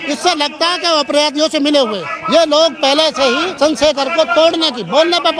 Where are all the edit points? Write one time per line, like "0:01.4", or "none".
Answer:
0:02.1
0:03.5